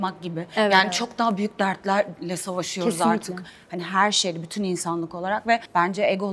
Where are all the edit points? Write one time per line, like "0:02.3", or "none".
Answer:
none